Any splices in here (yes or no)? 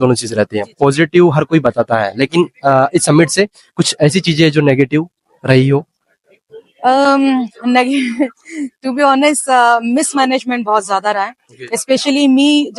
no